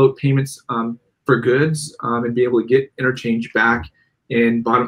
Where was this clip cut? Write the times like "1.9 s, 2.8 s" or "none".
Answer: none